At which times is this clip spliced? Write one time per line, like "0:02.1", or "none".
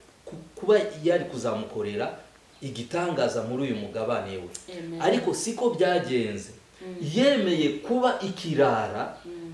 none